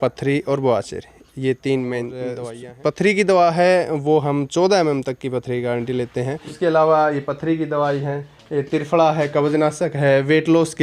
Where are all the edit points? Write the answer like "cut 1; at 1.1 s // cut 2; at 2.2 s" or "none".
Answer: cut 1; at 2.4 s // cut 2; at 6.5 s